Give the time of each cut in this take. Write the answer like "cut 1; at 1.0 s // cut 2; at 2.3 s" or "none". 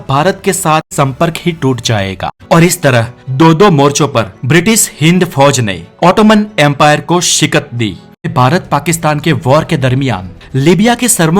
cut 1; at 0.9 s // cut 2; at 2.3 s // cut 3; at 8.3 s